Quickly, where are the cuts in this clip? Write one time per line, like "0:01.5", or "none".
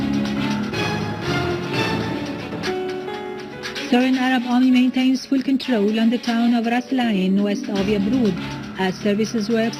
0:06.3